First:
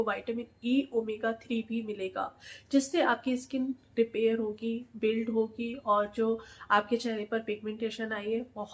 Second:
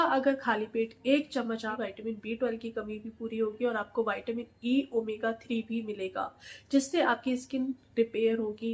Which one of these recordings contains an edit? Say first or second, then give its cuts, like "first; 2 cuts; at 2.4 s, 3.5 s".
second; 1 cut; at 1.7 s